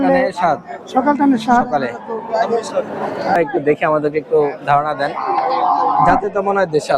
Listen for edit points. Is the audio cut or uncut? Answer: cut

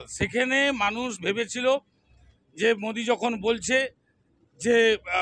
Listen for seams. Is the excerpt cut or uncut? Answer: uncut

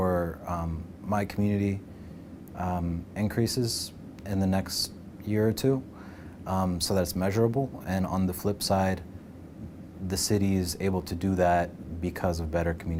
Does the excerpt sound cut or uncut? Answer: uncut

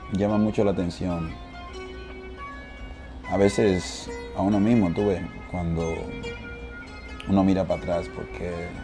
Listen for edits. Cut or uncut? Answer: uncut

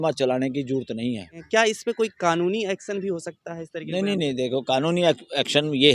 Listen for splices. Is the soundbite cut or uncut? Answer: cut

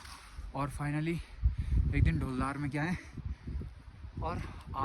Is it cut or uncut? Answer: uncut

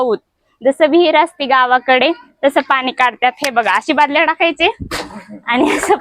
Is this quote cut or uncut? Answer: uncut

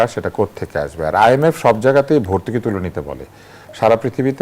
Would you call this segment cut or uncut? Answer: uncut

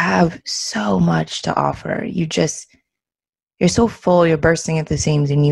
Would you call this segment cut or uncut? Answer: uncut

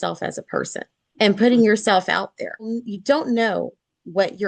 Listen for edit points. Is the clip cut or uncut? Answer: cut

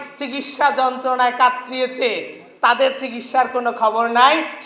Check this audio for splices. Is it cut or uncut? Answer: uncut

